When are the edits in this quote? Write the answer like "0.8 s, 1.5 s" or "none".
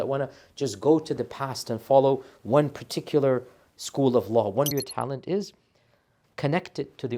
4.7 s